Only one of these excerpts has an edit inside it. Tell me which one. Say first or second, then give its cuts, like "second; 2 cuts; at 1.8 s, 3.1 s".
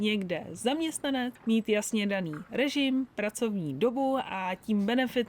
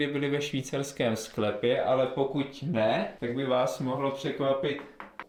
first; 1 cut; at 1.4 s